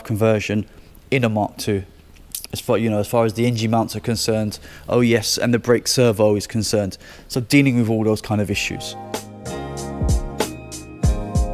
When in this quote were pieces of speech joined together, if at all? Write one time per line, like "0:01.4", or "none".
0:08.8